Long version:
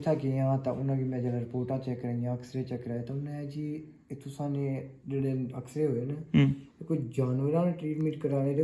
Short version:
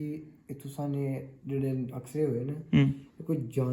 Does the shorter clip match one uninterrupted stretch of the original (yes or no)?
yes